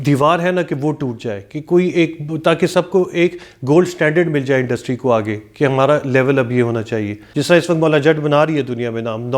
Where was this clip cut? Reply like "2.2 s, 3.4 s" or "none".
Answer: 7.2 s